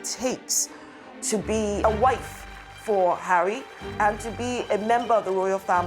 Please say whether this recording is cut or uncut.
cut